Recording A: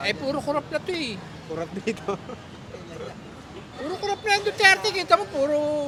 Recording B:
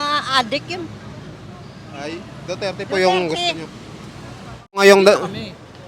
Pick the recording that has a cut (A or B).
B